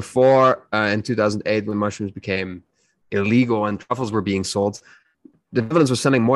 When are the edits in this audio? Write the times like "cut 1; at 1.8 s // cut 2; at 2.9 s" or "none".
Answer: cut 1; at 5.4 s